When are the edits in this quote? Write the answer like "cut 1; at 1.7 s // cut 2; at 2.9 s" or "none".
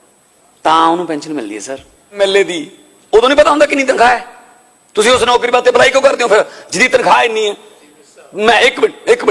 cut 1; at 2.2 s